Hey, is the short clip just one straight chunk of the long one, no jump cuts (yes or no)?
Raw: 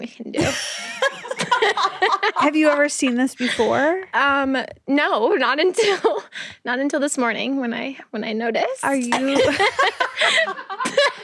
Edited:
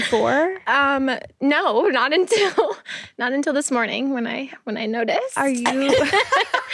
yes